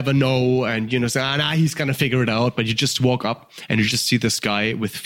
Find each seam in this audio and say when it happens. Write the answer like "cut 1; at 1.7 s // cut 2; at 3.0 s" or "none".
none